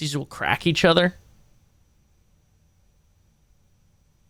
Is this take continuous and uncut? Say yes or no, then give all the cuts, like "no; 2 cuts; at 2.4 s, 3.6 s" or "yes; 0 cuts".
yes; 0 cuts